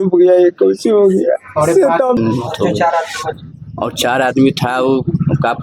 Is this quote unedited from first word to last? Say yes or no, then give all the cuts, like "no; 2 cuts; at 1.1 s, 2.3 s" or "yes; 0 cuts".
no; 1 cut; at 2.2 s